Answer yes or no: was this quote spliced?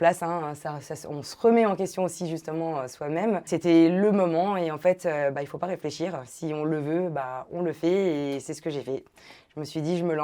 yes